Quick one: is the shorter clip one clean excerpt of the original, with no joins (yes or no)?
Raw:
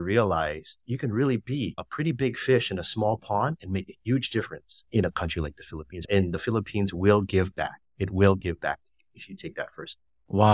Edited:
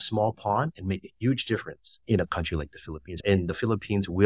yes